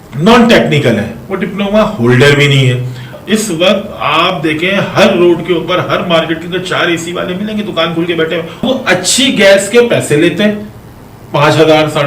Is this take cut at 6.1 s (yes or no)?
no